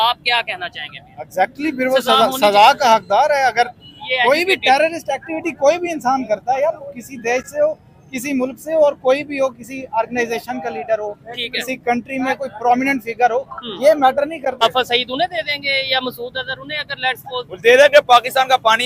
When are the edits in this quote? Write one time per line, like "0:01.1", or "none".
0:14.6